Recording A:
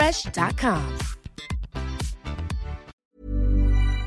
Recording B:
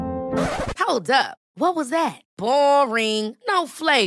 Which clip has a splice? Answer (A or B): A